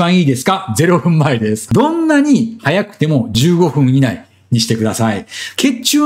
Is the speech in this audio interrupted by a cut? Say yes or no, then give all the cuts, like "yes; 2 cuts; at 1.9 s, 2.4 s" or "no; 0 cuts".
yes; 1 cut; at 1.6 s